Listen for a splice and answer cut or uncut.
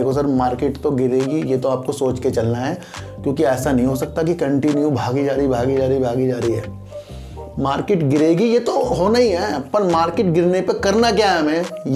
uncut